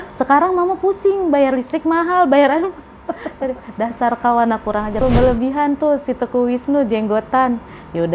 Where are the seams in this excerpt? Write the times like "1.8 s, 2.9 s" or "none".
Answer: 5.0 s

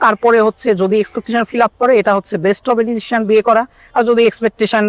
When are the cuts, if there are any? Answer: none

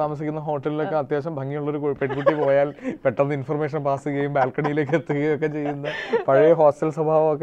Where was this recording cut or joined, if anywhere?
none

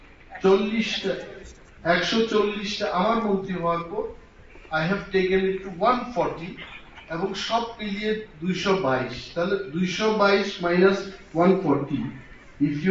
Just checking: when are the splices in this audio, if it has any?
none

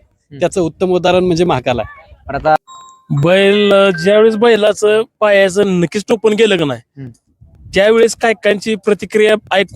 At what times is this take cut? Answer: 2.6 s

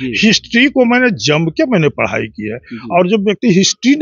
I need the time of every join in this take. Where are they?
none

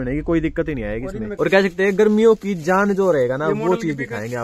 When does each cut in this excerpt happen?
1.3 s

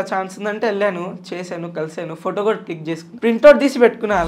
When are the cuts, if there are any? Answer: 3.1 s

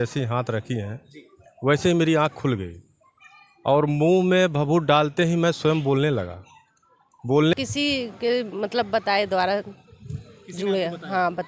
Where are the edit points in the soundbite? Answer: 7.5 s

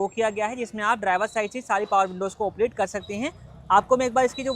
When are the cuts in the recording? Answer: none

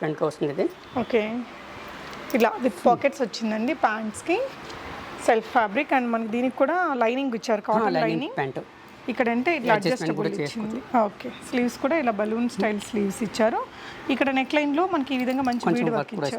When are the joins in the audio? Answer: none

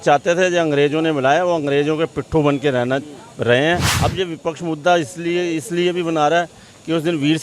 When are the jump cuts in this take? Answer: 3.9 s

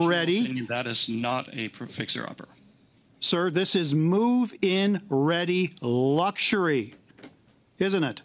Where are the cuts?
none

